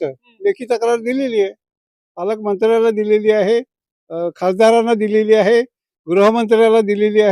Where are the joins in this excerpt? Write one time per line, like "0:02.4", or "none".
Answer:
none